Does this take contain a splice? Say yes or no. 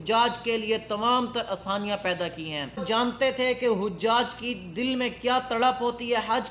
yes